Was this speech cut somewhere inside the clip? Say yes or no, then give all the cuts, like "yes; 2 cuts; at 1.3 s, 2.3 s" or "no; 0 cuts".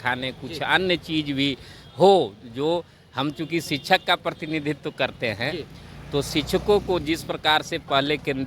no; 0 cuts